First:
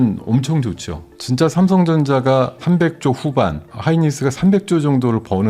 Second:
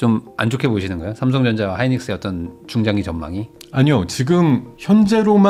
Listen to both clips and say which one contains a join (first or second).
first